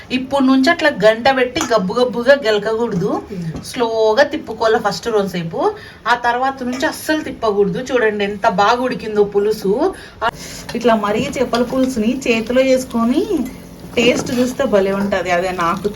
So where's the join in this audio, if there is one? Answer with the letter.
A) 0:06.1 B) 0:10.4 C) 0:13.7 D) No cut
B